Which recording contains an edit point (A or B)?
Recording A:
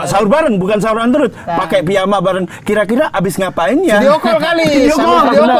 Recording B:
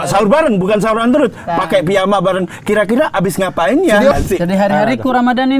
B